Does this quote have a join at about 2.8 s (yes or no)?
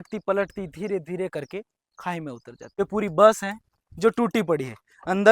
yes